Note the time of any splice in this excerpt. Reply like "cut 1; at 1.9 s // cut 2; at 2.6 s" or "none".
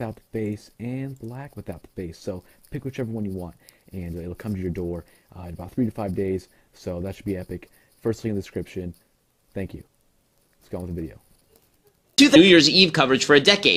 none